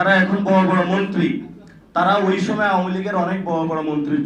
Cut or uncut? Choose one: uncut